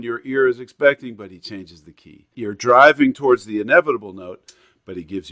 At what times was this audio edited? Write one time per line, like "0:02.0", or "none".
0:02.3